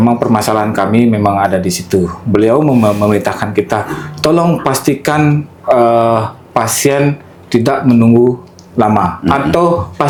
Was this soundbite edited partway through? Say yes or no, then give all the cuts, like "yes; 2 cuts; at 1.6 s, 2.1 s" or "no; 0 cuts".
no; 0 cuts